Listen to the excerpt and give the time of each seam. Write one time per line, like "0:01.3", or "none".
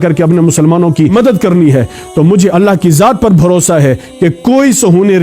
0:01.1
0:02.5